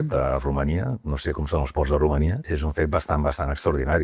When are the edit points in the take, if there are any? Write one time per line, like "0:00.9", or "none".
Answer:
0:02.4